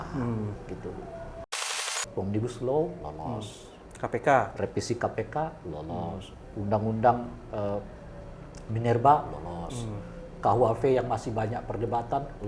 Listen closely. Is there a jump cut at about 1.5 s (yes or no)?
yes